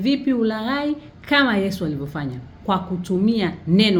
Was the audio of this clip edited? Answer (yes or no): no